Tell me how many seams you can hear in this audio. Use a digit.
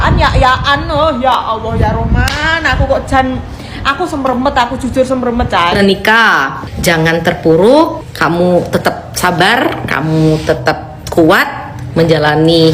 1